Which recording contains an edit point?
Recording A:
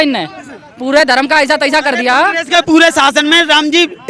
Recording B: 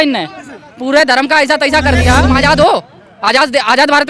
B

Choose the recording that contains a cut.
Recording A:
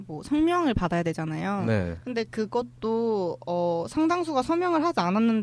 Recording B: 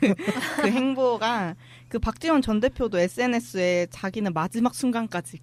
A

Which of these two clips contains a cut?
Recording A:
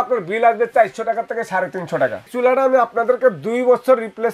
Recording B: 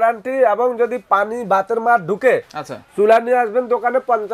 A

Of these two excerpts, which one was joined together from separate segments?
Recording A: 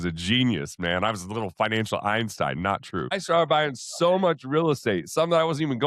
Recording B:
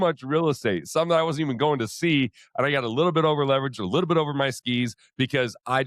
A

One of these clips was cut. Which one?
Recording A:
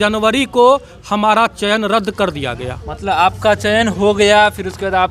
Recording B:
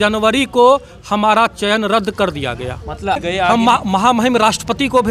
B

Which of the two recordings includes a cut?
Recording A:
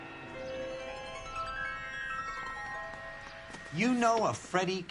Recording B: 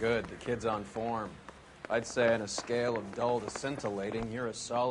A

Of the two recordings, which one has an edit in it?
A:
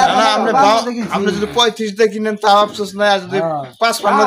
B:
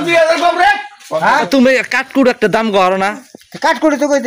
B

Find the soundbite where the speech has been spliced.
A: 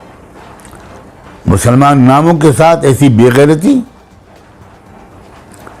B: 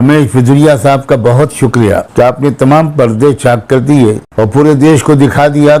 B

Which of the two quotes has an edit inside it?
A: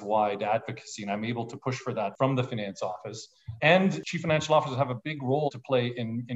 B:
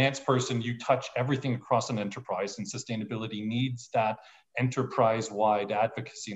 A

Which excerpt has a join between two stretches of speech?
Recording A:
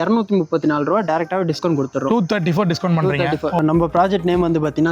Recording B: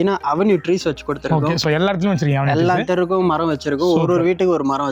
A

